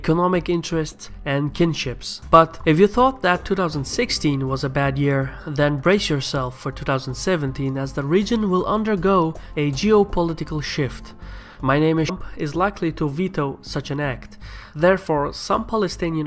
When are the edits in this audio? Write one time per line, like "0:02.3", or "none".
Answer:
none